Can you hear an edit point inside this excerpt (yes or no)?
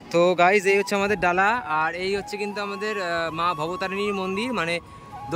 no